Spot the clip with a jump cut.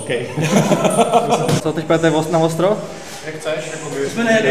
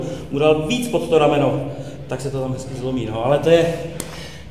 first; 1 cut; at 1.6 s

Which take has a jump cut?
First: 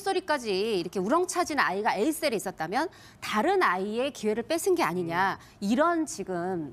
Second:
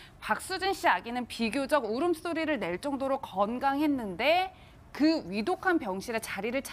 second; 1 cut; at 2.9 s

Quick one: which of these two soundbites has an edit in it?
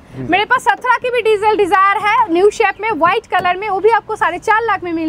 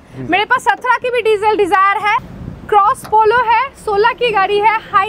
second; 1 cut; at 2.2 s

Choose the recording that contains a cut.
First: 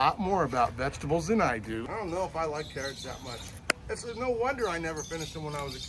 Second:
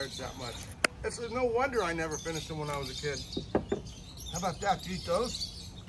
first; 1 cut; at 1.9 s

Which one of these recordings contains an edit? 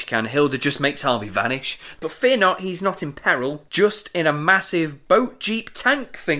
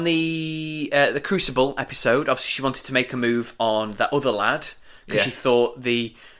first; 2 cuts; at 2.0 s, 3.6 s

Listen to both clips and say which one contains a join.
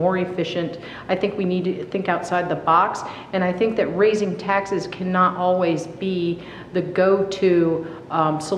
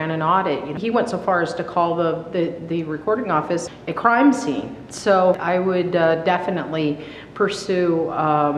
second; 3 cuts; at 0.8 s, 3.7 s, 5.4 s

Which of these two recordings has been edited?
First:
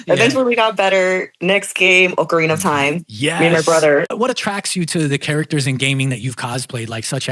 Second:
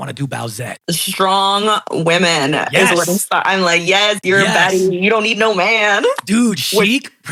first; 1 cut; at 4.4 s

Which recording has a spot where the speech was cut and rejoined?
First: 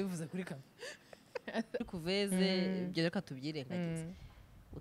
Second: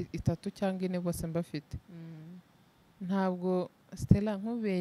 first; 1 cut; at 1.8 s

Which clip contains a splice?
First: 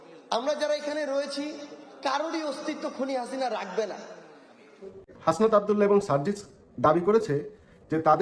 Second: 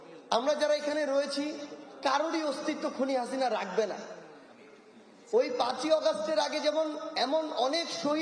first; 1 cut; at 5.0 s

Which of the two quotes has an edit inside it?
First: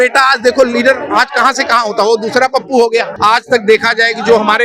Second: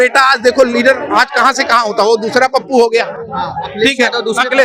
first; 1 cut; at 3.1 s

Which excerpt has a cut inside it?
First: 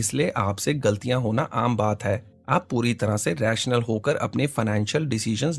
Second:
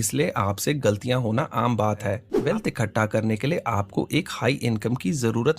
second; 1 cut; at 2.3 s

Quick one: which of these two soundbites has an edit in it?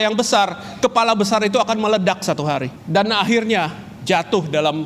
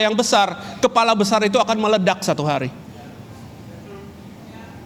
first; 1 cut; at 2.8 s

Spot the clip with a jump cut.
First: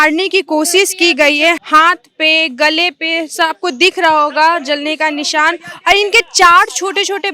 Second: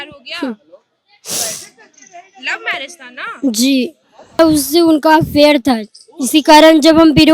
second; 1 cut; at 4.4 s

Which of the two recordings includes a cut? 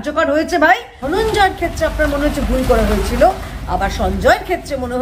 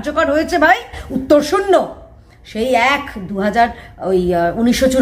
first; 1 cut; at 0.9 s

